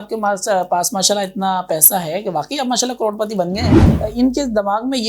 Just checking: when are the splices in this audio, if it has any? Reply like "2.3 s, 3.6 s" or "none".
3.8 s